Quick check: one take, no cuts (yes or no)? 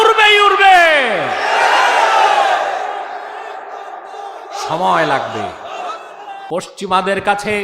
no